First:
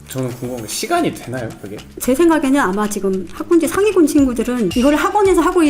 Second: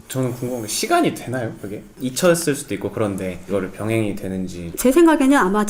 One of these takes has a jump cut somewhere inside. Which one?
first; 1 cut; at 1.9 s

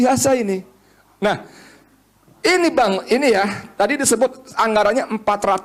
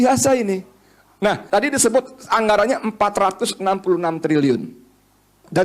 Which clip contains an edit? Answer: second; 1 cut; at 1.4 s

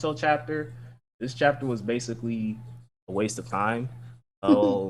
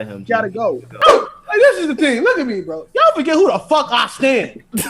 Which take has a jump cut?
second; 1 cut; at 1.0 s

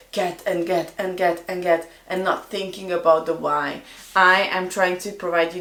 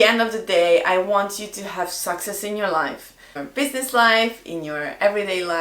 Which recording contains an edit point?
second; 1 cut; at 3.3 s

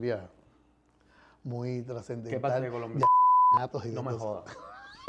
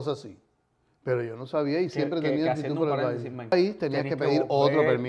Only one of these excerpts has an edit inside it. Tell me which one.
second; 1 cut; at 3.5 s

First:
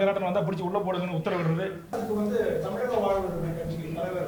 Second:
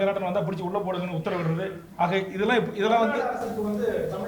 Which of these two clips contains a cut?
first; 1 cut; at 1.9 s

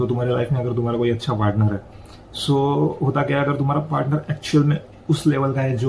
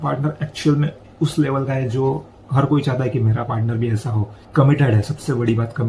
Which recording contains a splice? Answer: second; 1 cut; at 4.3 s

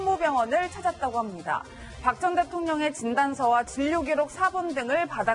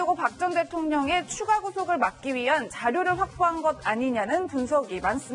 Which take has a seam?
second; 1 cut; at 2.2 s

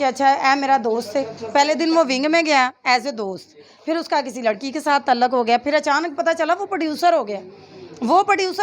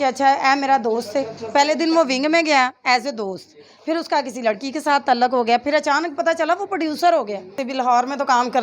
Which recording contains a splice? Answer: second; 1 cut; at 7.6 s

